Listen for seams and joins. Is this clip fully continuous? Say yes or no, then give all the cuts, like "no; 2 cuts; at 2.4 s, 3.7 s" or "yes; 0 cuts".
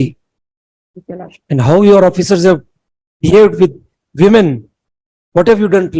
yes; 0 cuts